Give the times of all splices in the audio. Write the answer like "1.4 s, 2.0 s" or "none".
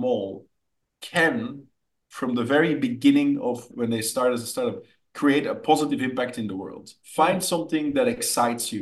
3.7 s, 6.9 s